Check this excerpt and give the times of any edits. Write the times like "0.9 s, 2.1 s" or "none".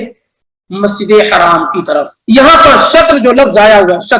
2.1 s